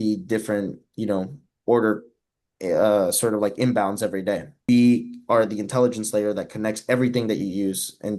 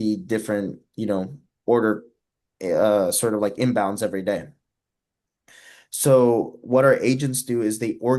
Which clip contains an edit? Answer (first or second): first